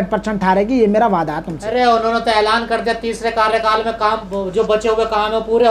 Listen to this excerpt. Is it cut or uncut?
uncut